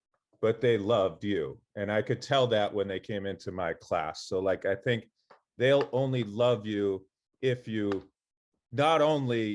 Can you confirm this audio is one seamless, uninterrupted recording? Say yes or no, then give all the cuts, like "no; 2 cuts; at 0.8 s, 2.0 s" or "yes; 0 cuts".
yes; 0 cuts